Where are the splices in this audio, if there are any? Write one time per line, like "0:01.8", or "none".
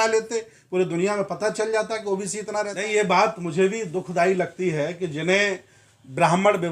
0:02.8